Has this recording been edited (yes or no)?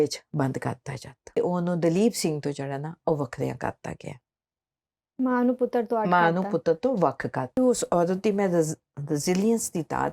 yes